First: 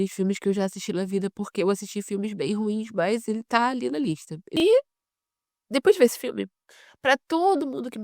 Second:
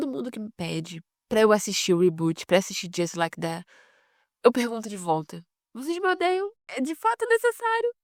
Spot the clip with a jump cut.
first; 1 cut; at 4.6 s

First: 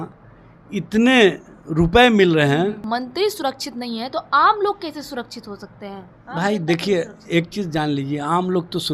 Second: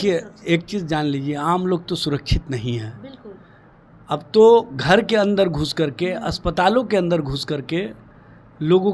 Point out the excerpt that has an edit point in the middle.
first; 1 cut; at 2.8 s

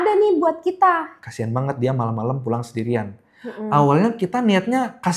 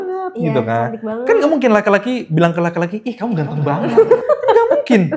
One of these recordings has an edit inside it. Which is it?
first; 1 cut; at 1.1 s

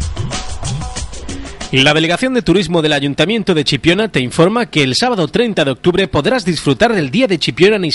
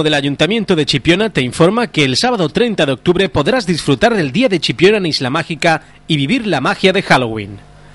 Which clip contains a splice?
first; 1 cut; at 1.6 s

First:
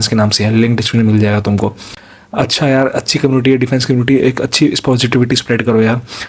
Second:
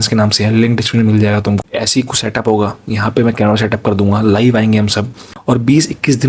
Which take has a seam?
second; 2 cuts; at 1.6 s, 5.3 s

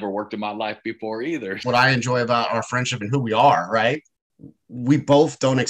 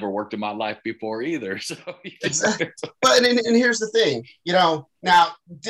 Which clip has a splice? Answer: first; 1 cut; at 1.6 s

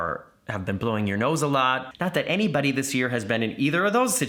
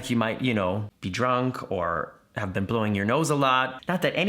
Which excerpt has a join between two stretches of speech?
second; 1 cut; at 0.9 s

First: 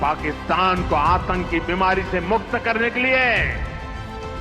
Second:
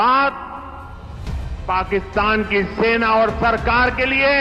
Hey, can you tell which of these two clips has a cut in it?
first; 1 cut; at 3.5 s

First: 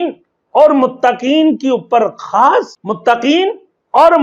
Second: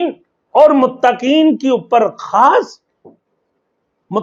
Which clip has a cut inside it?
first; 1 cut; at 2.8 s

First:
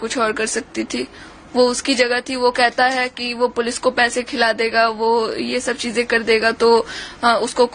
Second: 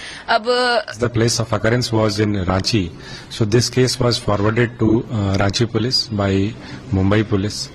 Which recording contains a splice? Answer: second; 1 cut; at 0.9 s

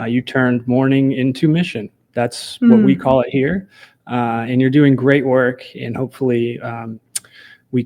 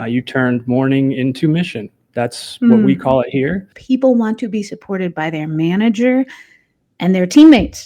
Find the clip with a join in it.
second; 1 cut; at 3.8 s

